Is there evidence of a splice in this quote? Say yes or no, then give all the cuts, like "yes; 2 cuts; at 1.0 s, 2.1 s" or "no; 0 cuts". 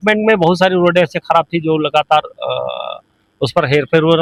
no; 0 cuts